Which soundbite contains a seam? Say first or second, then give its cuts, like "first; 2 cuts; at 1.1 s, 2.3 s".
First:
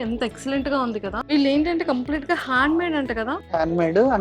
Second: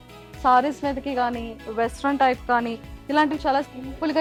first; 2 cuts; at 1.2 s, 3.4 s